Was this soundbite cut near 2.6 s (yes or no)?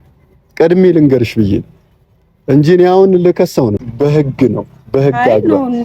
no